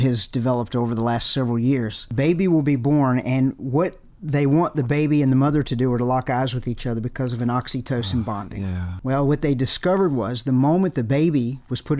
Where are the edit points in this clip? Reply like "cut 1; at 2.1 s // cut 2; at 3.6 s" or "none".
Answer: cut 1; at 2.0 s // cut 2; at 8.9 s